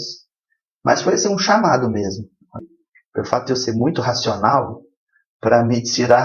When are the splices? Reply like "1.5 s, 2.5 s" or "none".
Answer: 2.7 s